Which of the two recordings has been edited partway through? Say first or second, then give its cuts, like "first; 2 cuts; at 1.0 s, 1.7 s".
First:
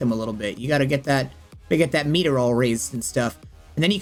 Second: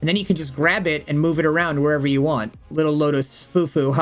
second; 1 cut; at 2.7 s